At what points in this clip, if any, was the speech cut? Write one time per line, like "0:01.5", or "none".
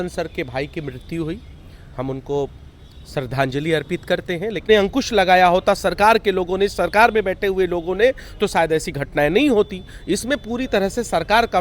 0:04.6